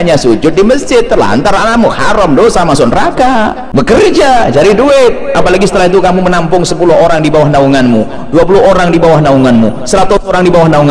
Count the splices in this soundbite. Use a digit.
1